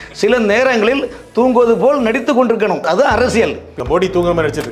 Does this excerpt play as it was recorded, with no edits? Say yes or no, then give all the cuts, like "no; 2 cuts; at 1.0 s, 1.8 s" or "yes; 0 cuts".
no; 2 cuts; at 2.8 s, 3.8 s